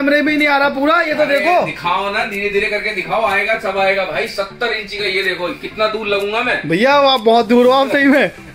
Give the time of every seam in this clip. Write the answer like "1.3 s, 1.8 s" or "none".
none